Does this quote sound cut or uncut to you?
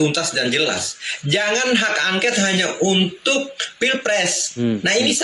uncut